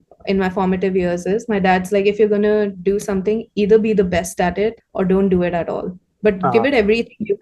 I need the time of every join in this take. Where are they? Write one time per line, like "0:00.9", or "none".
0:04.8